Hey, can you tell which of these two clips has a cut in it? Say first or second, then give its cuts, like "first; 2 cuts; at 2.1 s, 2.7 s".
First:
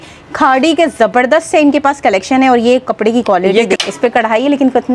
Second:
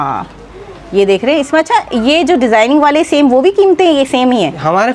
first; 1 cut; at 3.8 s